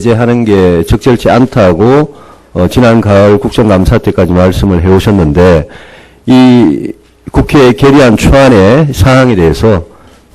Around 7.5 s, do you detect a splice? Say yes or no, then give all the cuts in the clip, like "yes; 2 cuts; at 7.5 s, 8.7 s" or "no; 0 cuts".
no; 1 cut; at 1.0 s